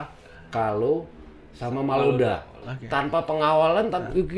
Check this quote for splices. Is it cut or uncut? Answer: cut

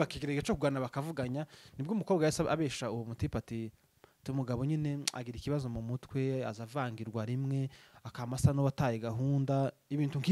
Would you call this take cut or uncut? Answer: uncut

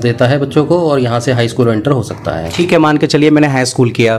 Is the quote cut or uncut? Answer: uncut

